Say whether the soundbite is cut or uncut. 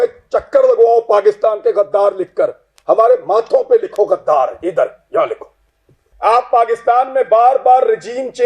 cut